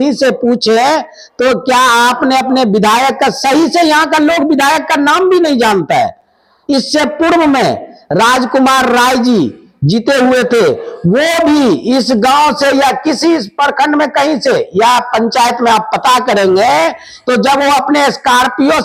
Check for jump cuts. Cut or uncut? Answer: uncut